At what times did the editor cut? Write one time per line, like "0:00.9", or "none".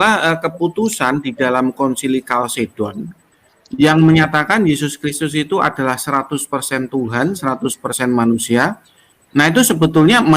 none